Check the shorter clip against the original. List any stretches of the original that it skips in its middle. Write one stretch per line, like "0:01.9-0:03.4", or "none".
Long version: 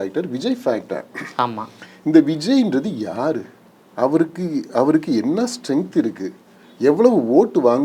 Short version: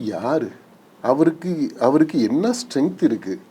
none